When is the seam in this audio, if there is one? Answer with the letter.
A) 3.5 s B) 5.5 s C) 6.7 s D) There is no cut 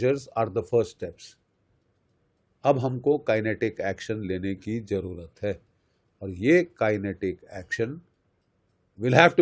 D